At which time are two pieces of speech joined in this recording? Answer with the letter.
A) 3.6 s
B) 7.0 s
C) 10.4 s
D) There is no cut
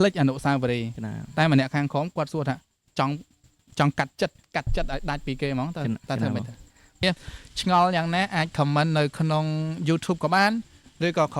B